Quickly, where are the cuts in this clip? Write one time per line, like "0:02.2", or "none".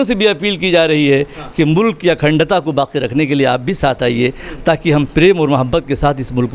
none